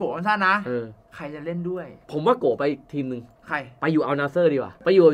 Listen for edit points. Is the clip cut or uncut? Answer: uncut